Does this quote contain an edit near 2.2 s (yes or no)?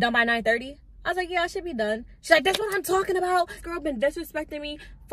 no